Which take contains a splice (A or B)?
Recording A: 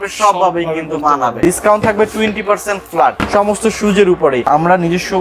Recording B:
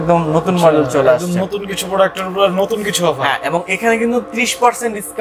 A